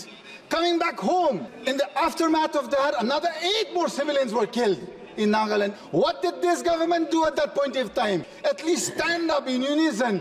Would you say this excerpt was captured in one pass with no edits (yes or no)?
no